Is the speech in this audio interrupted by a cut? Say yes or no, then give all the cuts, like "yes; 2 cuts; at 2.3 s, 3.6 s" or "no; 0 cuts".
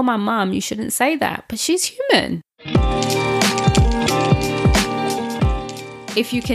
yes; 1 cut; at 2.5 s